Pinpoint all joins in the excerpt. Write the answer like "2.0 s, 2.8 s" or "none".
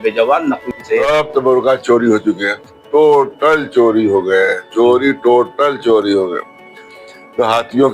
1.0 s